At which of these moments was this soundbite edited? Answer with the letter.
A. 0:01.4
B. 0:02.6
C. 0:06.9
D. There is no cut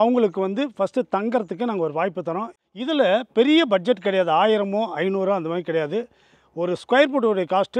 B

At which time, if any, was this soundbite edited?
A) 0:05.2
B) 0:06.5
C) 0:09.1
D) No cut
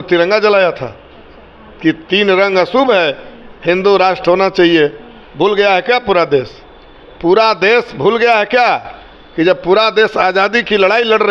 D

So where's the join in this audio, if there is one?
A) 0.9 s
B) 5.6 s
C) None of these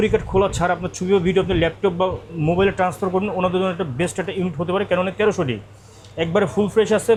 C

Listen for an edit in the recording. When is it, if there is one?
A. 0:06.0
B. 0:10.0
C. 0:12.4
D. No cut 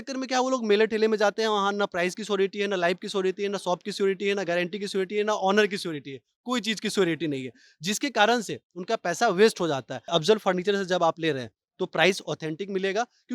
B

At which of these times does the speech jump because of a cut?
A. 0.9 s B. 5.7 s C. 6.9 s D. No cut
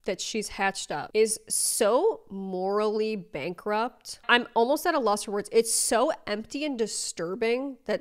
A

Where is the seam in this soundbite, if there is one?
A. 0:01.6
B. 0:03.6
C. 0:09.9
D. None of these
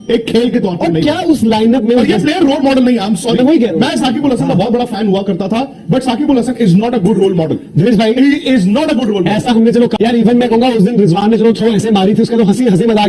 C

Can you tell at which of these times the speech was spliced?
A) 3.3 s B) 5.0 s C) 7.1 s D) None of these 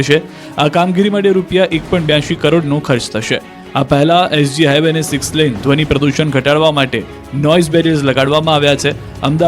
B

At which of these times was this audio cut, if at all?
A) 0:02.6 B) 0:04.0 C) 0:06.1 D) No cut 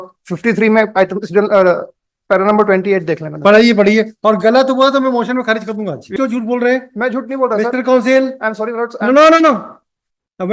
C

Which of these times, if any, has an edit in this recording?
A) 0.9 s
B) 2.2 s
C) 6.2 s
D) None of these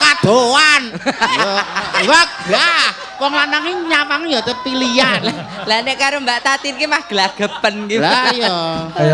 A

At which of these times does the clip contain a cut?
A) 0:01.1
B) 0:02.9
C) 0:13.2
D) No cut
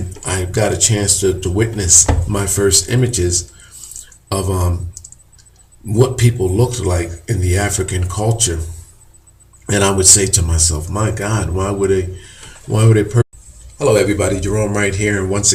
D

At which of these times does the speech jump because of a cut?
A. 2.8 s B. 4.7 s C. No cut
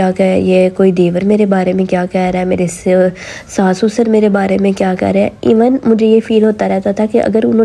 C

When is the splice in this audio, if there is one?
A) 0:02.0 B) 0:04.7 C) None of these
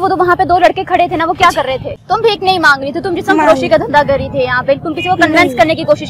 A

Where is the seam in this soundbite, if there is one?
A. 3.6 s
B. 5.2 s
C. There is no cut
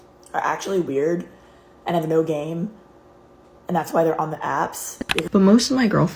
B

